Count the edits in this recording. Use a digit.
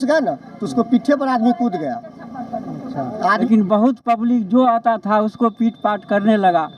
1